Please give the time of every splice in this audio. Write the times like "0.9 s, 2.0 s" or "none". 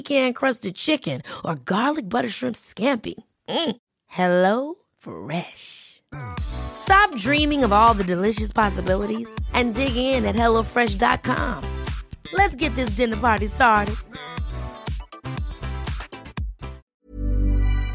17.0 s